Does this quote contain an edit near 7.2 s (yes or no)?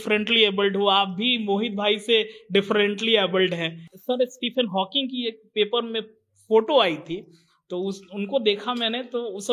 no